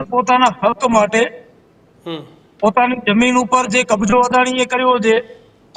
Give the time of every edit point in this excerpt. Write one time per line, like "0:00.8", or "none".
none